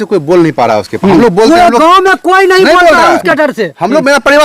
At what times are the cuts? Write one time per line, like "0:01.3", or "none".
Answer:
none